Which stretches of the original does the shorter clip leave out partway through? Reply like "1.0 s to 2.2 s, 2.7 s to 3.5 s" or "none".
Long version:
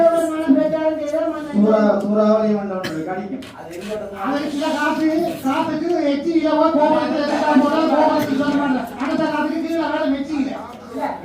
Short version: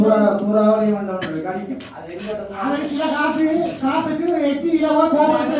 none